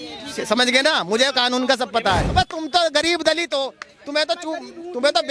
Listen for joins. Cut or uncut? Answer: cut